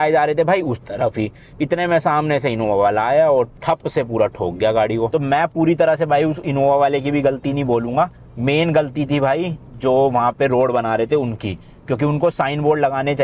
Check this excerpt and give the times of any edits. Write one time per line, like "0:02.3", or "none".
none